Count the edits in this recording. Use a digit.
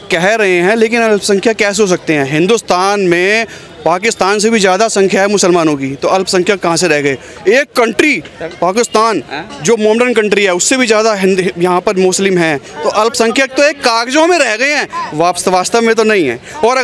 0